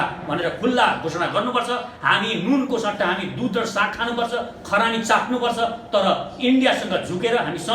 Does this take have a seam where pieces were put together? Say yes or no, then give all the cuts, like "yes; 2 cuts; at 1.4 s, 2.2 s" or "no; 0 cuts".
no; 0 cuts